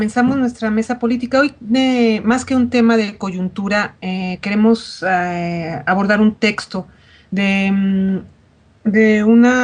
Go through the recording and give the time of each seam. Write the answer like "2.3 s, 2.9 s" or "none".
2.4 s